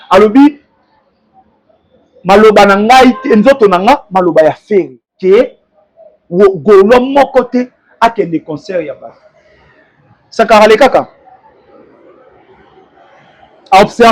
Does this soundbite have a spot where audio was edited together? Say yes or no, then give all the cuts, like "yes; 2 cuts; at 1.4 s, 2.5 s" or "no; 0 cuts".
yes; 1 cut; at 5.0 s